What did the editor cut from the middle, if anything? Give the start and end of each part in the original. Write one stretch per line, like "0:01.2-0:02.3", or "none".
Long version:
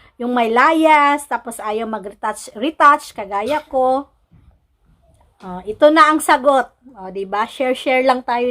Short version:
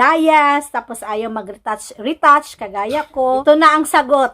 0:04.0-0:05.8